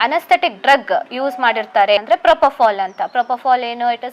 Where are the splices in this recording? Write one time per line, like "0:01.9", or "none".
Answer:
0:02.0

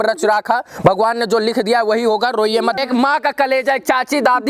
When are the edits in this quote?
0:02.8

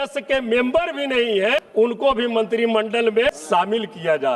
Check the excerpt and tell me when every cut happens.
0:01.7
0:03.3

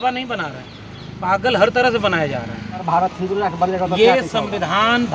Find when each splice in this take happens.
0:02.8

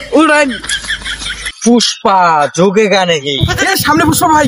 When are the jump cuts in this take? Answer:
0:03.5

